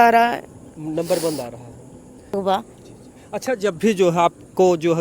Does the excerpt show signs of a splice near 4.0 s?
no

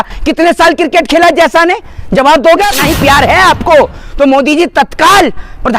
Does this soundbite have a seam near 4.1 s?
no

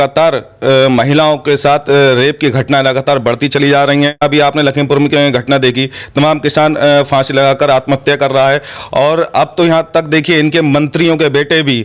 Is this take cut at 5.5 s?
no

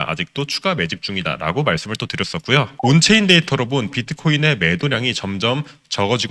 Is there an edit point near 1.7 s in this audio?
no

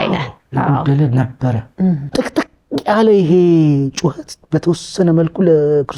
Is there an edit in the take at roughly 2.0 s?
yes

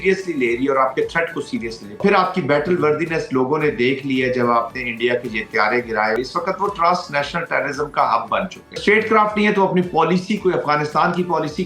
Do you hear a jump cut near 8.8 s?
yes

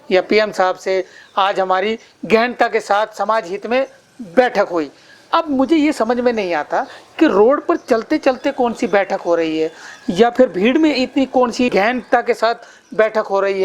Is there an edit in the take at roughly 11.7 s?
yes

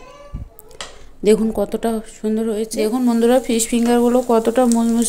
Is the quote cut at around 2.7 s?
yes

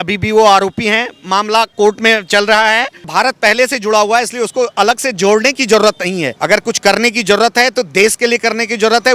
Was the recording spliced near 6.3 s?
yes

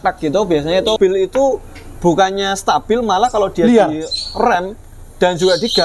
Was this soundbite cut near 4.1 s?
no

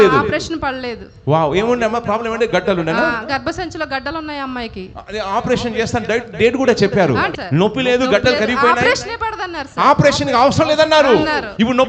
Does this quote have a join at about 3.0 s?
no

